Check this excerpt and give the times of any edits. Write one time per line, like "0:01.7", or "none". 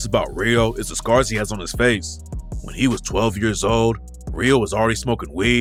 none